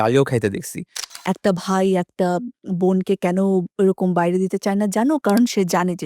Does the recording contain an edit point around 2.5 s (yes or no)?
no